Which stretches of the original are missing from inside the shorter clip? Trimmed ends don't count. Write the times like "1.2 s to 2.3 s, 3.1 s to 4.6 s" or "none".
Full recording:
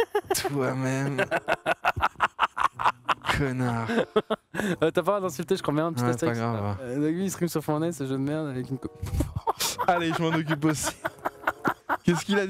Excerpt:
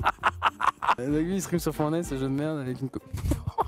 3.0 s to 6.9 s